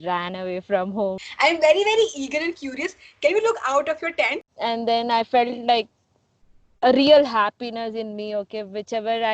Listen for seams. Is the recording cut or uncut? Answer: cut